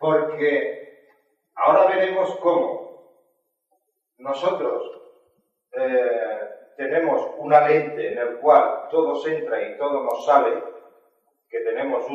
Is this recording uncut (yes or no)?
no